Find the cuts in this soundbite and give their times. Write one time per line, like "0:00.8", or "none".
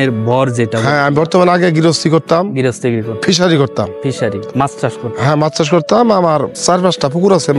0:06.5